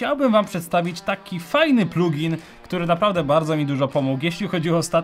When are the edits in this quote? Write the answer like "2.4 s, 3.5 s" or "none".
3.1 s

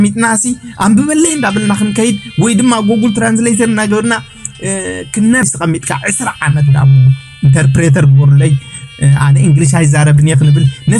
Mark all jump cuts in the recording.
5.4 s

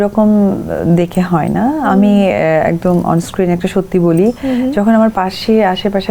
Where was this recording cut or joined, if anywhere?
none

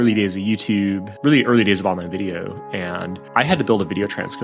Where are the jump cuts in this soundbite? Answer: none

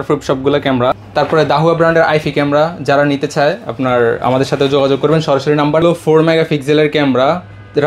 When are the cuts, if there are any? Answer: 1.0 s, 5.8 s

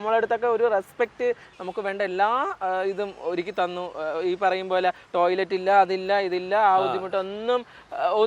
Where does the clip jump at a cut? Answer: 1.5 s

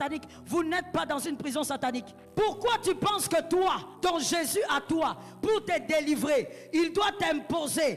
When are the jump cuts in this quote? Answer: 2.2 s, 3.9 s

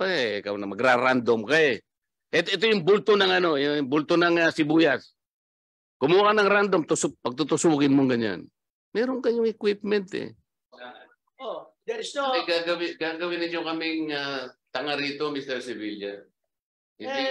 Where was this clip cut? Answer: 10.8 s

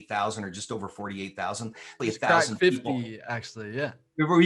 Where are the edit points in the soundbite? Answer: 2.0 s

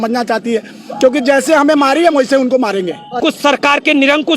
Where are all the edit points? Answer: 3.2 s

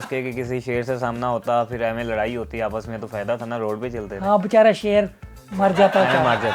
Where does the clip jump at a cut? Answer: none

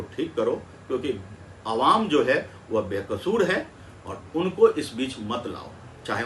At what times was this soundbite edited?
none

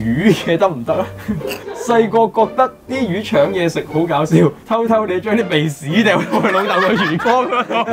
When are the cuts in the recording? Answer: 1.6 s

